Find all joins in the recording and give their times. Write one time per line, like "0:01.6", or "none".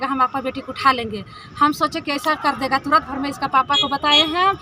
none